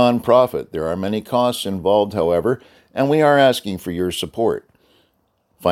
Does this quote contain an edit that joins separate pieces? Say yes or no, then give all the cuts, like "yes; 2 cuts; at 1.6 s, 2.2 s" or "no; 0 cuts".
no; 0 cuts